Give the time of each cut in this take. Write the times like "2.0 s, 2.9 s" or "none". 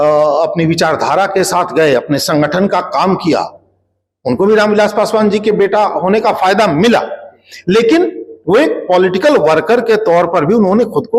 none